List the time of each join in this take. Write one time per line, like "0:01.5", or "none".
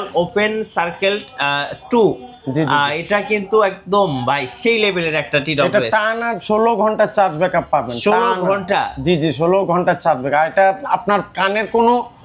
none